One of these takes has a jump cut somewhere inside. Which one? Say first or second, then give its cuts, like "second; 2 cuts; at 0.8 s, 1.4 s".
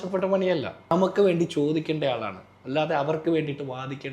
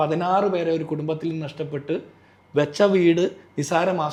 first; 1 cut; at 0.9 s